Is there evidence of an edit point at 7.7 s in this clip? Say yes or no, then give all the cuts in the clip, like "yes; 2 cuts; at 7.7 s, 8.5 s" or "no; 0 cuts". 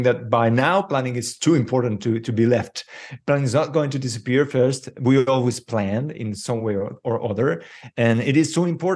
no; 0 cuts